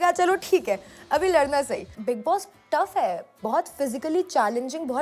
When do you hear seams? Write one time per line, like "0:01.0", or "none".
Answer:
0:01.9